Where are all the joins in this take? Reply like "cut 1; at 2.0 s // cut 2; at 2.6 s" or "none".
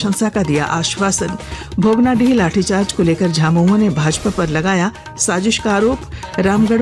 none